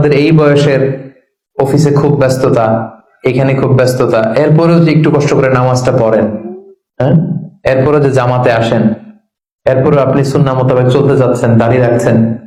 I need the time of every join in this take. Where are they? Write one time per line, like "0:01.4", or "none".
none